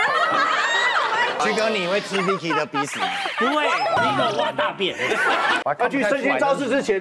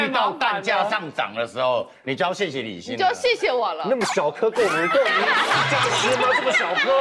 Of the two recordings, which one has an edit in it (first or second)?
first